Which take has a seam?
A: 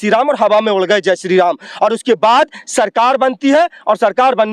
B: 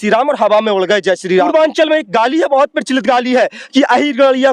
B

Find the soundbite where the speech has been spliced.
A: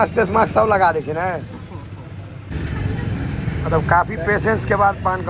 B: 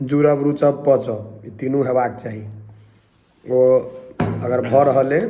A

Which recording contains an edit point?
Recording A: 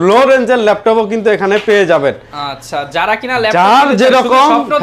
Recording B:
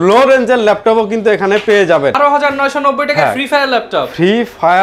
B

